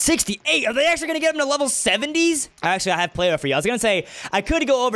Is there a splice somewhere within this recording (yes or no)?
yes